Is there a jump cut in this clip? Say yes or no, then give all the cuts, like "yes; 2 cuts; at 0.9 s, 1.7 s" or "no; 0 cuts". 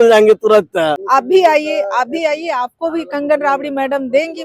yes; 1 cut; at 1.0 s